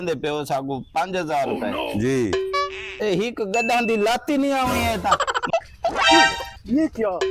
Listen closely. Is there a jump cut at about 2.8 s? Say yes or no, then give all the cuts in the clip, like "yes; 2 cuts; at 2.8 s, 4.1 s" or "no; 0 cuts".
no; 1 cut; at 5.4 s